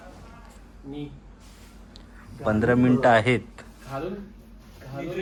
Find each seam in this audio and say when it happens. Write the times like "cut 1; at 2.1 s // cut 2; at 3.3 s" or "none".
none